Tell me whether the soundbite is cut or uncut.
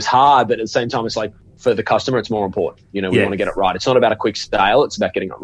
uncut